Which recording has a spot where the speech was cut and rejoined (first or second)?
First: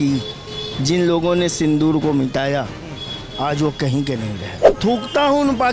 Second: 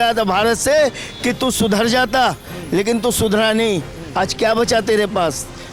first